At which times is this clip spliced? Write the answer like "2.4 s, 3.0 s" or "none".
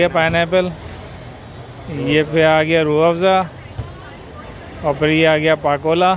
none